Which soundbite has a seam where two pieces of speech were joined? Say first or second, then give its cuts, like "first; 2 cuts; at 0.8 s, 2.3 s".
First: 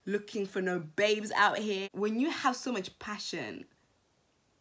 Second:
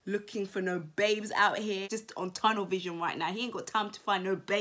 first; 1 cut; at 1.9 s